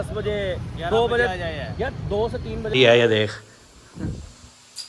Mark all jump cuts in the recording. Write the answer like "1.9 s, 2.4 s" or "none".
2.7 s